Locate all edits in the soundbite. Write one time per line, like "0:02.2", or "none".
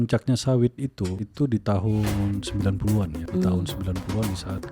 0:01.2
0:03.2